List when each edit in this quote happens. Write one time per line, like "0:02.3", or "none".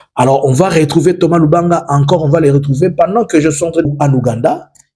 0:03.8